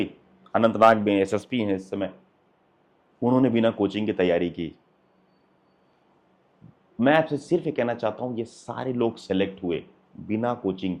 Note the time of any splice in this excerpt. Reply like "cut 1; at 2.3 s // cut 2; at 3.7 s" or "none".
none